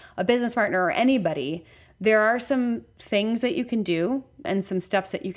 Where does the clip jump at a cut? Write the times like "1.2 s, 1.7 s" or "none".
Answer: 4.5 s